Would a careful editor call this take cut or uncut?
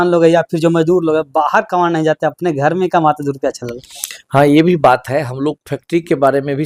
uncut